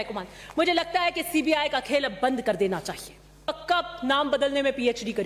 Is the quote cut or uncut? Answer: cut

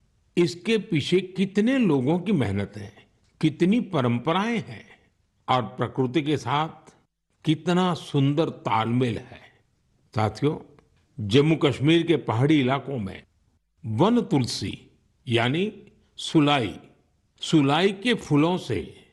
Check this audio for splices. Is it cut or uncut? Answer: uncut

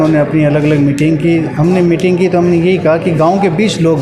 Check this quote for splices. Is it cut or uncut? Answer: uncut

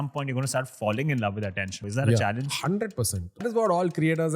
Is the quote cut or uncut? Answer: cut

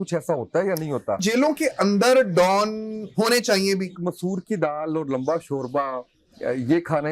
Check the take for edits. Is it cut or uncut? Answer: cut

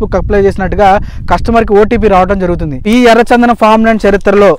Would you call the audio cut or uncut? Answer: cut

